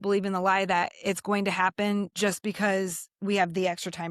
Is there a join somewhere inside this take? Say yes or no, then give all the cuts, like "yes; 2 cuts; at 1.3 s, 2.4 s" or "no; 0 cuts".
yes; 1 cut; at 2.1 s